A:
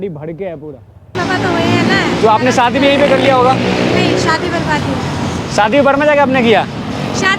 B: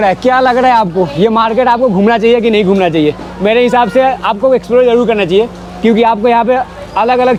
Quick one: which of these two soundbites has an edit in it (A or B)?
A